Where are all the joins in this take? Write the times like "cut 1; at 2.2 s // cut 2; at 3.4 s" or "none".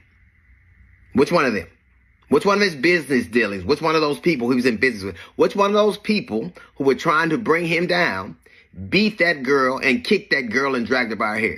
none